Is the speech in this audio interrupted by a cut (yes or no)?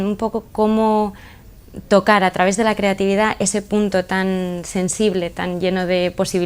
yes